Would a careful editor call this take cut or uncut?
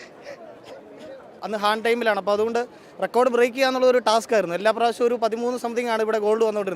cut